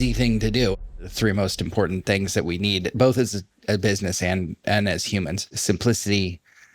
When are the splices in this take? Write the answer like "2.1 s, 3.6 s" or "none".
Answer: 0.7 s, 5.5 s